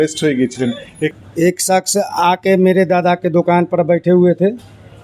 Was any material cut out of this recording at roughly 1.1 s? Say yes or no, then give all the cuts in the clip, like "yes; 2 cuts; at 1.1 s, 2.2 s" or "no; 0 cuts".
yes; 1 cut; at 1.1 s